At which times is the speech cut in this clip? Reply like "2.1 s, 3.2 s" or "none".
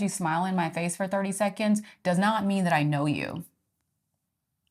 none